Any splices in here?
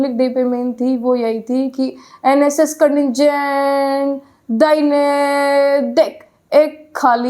no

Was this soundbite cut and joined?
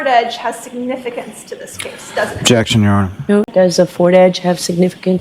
yes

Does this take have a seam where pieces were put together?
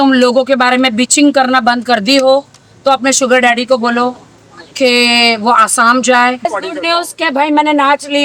yes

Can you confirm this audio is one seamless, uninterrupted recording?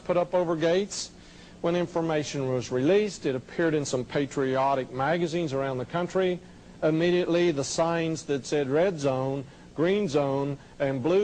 yes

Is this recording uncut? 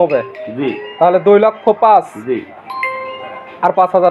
yes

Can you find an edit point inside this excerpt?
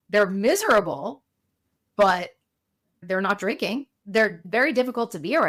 no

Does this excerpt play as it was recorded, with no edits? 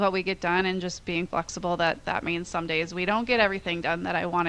yes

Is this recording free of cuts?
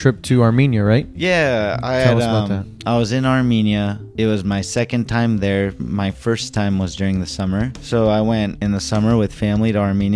yes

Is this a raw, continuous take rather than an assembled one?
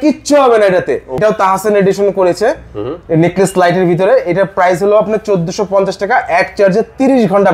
no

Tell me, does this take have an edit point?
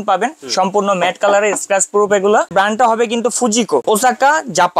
yes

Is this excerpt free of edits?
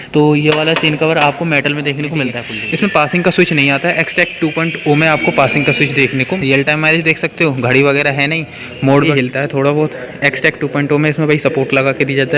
no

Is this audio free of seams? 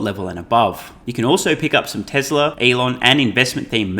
no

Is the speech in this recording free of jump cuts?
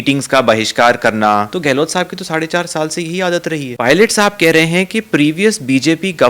no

